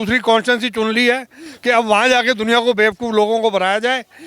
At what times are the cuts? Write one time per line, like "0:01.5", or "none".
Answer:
none

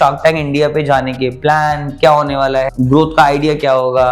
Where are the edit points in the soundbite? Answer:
0:02.7

